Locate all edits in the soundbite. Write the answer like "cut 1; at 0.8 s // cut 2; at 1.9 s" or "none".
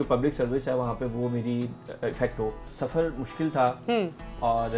cut 1; at 2.7 s